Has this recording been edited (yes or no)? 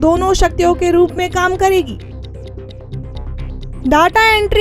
no